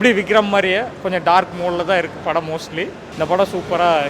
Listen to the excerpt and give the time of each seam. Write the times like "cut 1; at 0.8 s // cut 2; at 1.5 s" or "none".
cut 1; at 3.0 s